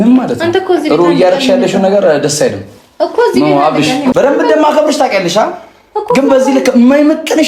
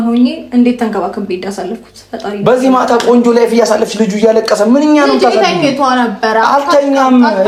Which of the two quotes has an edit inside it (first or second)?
first